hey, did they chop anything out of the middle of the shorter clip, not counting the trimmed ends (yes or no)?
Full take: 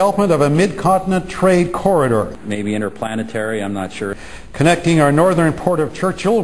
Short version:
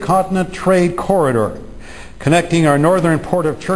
yes